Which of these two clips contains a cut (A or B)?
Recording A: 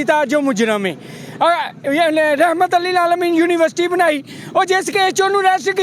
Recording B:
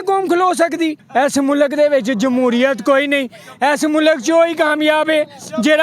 B